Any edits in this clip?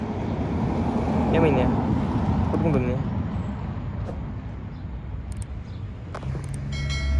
no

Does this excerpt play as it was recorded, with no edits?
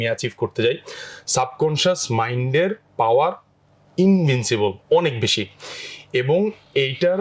yes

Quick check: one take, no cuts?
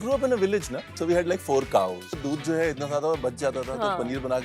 no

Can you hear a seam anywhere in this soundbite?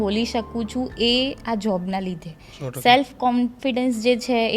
no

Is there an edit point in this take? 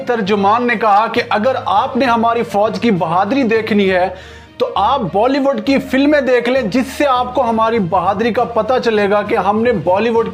no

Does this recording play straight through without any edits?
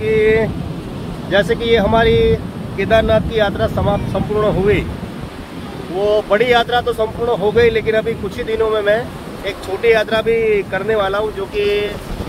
yes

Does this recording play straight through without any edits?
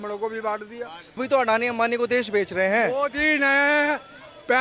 no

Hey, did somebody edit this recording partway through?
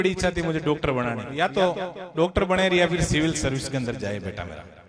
yes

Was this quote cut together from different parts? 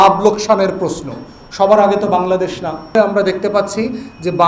yes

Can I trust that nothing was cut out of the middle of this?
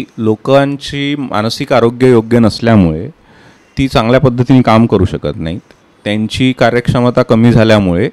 yes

